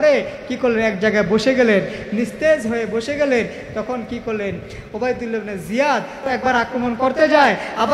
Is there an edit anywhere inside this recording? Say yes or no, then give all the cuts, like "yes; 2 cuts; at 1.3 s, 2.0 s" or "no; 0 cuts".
yes; 1 cut; at 6.2 s